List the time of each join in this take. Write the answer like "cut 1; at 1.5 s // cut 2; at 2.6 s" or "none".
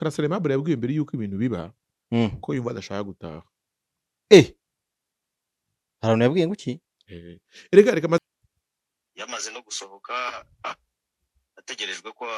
cut 1; at 8.2 s